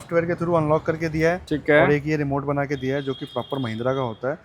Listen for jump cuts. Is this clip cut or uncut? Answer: uncut